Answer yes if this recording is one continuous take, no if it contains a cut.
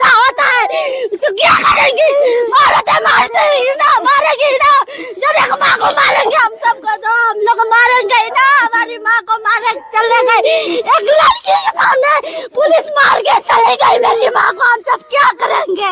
yes